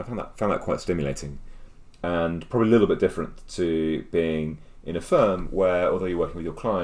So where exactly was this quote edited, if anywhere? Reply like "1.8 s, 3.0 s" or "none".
none